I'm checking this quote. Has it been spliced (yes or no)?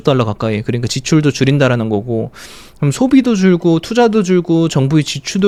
no